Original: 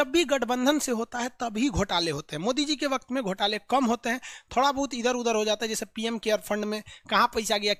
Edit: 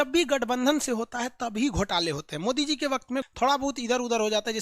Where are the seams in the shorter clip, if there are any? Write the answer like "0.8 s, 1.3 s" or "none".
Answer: 3.3 s